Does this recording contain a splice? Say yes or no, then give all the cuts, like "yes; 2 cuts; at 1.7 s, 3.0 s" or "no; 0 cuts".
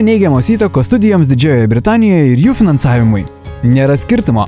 yes; 1 cut; at 3.4 s